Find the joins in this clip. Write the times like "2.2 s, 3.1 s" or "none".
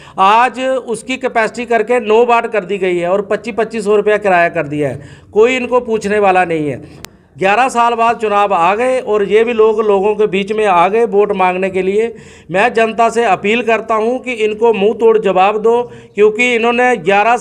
6.9 s